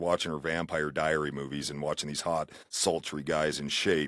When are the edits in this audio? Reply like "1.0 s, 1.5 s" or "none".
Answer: 2.6 s

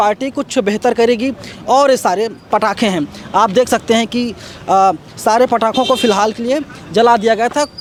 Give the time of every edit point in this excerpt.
none

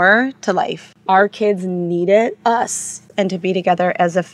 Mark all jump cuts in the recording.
0.9 s, 3.0 s

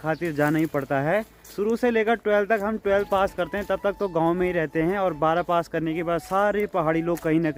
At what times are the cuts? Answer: none

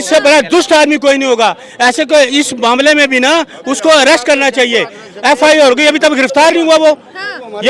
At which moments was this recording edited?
none

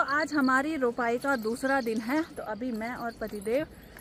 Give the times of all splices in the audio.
none

